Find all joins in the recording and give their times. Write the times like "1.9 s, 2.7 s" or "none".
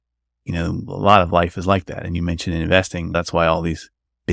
3.1 s